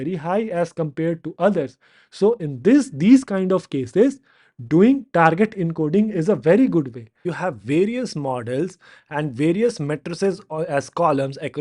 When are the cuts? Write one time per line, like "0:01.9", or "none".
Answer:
0:07.3